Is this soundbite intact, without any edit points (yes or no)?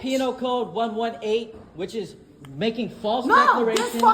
no